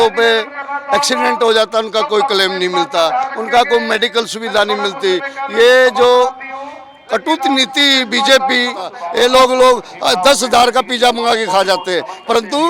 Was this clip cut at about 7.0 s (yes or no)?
no